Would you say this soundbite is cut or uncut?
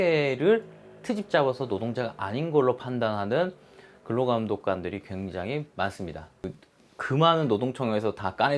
cut